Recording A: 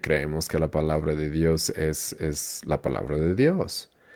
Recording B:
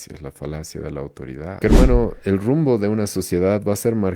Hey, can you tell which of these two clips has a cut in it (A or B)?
B